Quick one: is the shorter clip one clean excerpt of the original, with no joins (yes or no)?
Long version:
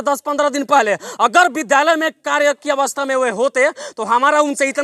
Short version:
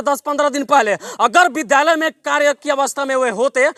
yes